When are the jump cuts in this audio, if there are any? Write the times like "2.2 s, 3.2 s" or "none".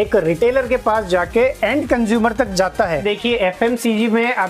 3.0 s